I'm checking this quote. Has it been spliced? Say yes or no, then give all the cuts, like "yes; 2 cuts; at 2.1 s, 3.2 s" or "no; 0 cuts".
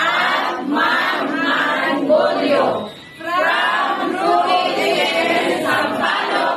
no; 0 cuts